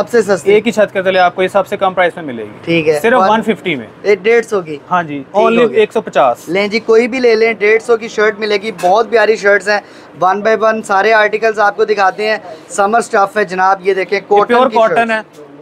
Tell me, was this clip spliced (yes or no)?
no